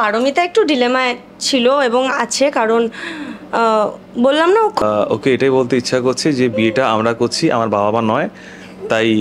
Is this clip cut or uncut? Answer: cut